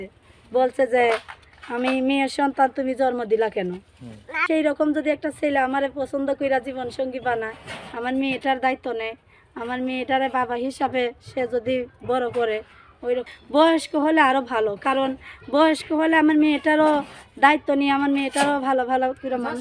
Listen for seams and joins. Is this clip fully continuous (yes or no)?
no